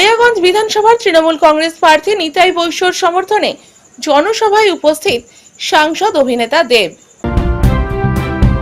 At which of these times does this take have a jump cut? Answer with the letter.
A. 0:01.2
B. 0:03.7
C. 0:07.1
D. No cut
C